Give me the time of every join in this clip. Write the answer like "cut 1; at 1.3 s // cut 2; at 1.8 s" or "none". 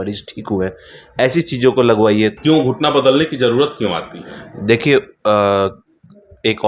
cut 1; at 2.4 s